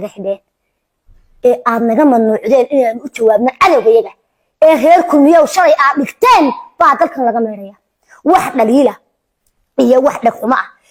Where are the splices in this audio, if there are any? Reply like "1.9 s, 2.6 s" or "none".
none